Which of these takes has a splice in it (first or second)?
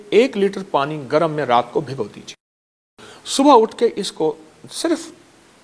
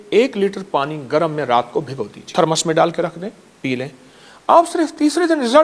second